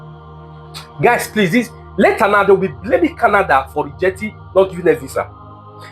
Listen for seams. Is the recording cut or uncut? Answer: cut